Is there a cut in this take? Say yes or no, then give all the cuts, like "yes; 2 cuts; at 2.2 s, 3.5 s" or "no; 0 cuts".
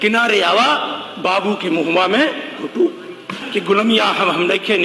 yes; 1 cut; at 3.3 s